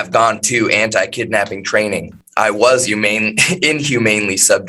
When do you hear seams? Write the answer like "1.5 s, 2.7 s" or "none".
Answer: 2.2 s

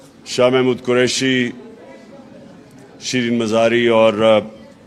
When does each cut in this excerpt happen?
1.3 s

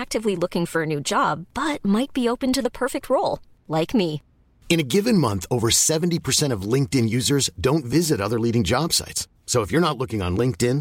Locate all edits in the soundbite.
none

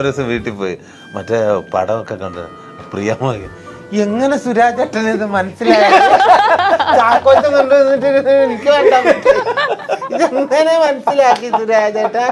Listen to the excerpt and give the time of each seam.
none

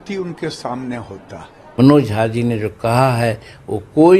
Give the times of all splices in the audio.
1.8 s

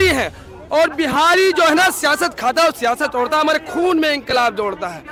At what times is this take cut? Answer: none

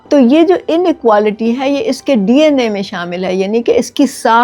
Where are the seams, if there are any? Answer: none

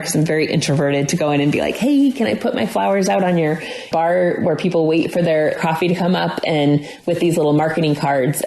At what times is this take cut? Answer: 5.6 s

